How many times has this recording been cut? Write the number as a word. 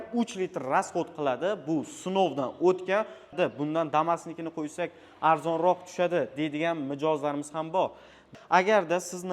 two